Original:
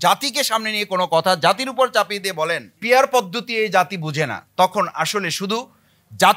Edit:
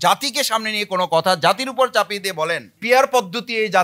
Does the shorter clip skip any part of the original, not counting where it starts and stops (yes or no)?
no